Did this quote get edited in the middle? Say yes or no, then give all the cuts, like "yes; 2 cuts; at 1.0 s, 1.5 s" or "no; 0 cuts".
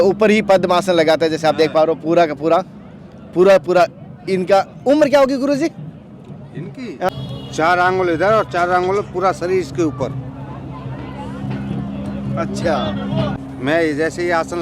yes; 2 cuts; at 7.1 s, 13.4 s